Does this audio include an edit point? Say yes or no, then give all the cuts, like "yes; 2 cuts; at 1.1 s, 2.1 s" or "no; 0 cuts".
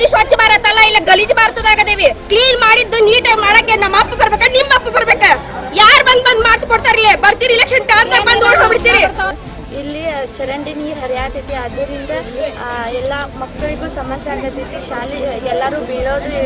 yes; 2 cuts; at 2.2 s, 9.5 s